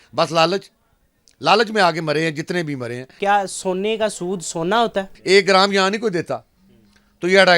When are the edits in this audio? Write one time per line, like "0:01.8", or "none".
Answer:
0:03.1
0:05.1